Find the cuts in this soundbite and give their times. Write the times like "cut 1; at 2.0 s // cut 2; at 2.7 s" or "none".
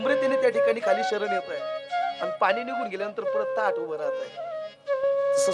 cut 1; at 2.1 s